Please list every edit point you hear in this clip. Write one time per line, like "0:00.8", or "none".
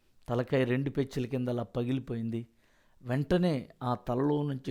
none